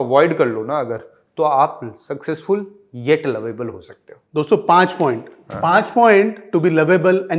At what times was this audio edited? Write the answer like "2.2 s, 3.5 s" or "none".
none